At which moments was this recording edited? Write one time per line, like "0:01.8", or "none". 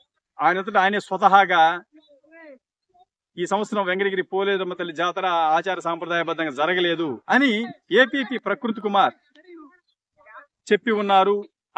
0:07.8